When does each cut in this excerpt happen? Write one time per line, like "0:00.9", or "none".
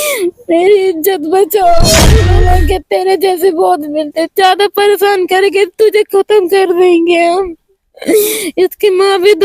0:02.3